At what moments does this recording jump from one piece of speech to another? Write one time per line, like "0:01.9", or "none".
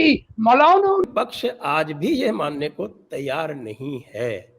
0:01.0